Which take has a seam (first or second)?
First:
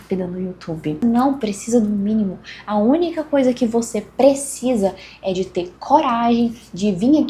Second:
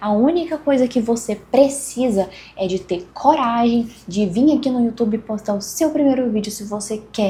first